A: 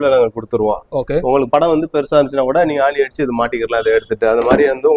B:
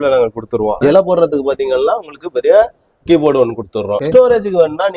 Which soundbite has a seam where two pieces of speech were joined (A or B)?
B